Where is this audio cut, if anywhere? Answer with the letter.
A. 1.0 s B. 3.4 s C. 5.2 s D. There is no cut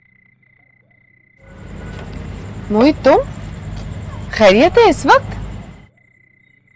A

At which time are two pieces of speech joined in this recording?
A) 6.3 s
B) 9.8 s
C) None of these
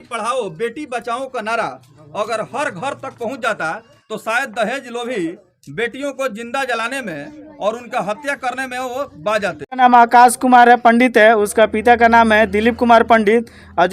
B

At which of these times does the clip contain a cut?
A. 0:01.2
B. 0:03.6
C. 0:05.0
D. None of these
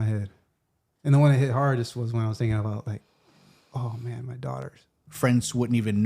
C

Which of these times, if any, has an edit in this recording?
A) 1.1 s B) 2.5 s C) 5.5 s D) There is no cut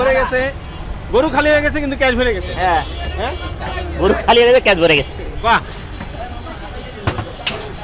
D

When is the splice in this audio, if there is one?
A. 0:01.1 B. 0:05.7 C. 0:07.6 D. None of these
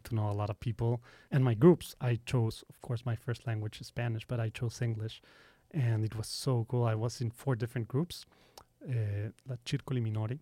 A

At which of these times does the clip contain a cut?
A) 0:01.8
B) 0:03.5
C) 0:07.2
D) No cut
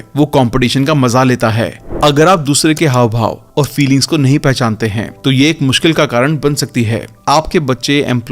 A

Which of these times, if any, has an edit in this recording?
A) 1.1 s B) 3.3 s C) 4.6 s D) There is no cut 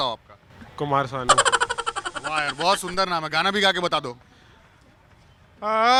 D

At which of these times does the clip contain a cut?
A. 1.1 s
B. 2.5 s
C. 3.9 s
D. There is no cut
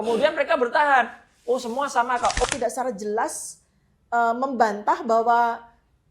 B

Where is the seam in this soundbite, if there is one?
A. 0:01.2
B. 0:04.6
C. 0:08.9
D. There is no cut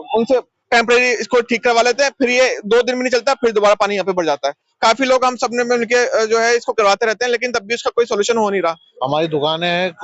C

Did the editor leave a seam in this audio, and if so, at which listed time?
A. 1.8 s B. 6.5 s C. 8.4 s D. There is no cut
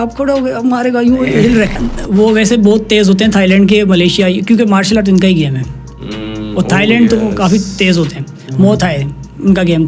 A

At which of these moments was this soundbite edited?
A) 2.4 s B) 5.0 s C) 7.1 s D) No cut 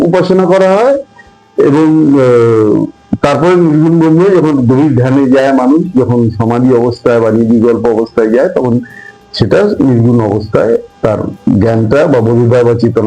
D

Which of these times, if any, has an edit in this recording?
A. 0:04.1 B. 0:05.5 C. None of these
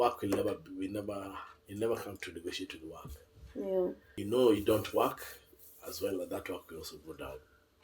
A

